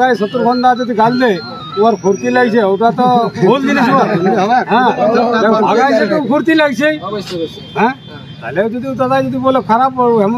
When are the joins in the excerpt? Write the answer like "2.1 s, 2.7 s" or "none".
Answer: none